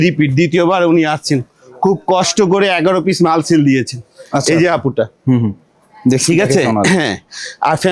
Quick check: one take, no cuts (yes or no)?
yes